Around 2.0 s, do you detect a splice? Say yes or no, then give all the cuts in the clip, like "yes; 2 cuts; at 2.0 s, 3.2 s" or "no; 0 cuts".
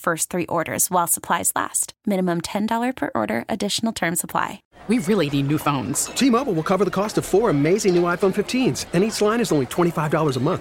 no; 1 cut; at 4.7 s